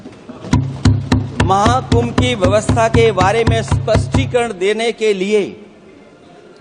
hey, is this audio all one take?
yes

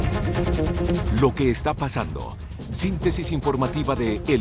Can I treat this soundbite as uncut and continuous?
yes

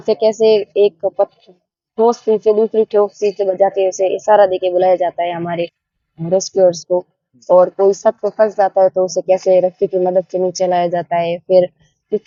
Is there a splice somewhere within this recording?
no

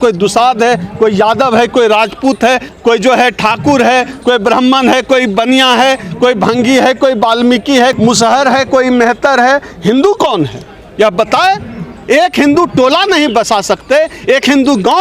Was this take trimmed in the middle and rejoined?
no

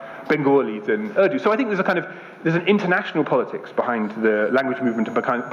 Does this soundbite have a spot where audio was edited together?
no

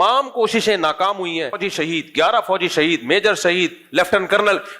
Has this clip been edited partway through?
yes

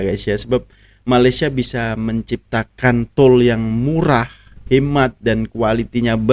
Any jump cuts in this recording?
no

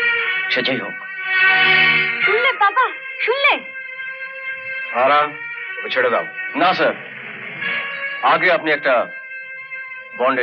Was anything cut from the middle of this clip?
no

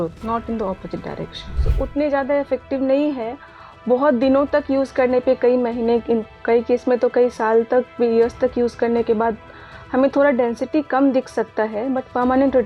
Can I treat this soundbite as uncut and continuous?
no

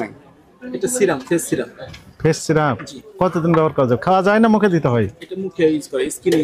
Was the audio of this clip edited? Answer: no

